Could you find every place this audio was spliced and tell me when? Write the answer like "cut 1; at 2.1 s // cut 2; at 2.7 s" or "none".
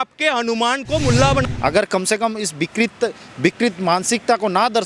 cut 1; at 1.4 s

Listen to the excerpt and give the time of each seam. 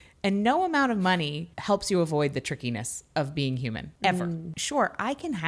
cut 1; at 1.5 s // cut 2; at 3.9 s // cut 3; at 4.5 s

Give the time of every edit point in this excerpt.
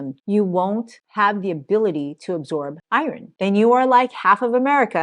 cut 1; at 3.2 s

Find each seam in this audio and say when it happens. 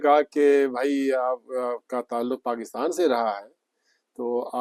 none

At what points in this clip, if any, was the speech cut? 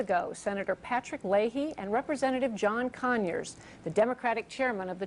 cut 1; at 1.8 s

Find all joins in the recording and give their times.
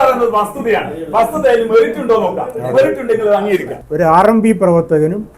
cut 1; at 3.8 s

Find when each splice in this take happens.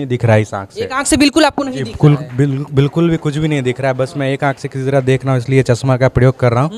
none

